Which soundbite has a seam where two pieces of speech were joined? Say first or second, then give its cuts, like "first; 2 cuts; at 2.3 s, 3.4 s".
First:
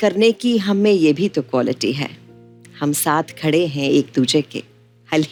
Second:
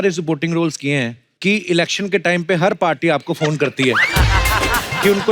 second; 1 cut; at 1.2 s